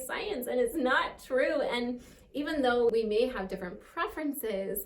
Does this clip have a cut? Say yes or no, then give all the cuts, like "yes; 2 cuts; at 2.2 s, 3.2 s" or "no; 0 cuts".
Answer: yes; 1 cut; at 2.9 s